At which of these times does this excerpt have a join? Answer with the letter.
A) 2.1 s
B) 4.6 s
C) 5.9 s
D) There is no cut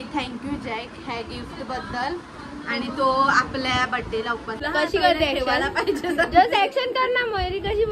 B